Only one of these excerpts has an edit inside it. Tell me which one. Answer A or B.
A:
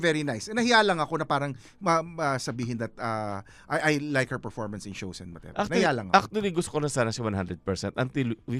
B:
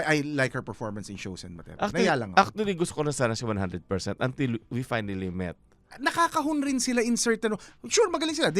B